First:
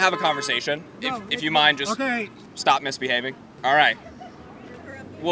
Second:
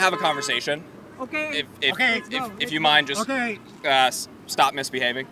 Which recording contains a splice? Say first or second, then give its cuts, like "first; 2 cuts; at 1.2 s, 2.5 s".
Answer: first; 3 cuts; at 1.0 s, 2.4 s, 3.5 s